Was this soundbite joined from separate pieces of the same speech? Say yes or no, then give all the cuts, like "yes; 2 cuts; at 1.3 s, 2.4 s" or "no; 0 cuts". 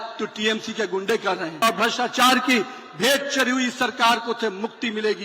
yes; 1 cut; at 1.6 s